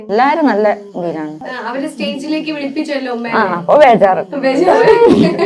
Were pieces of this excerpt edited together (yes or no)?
yes